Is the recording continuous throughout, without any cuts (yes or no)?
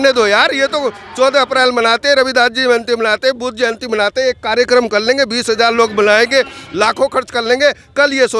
yes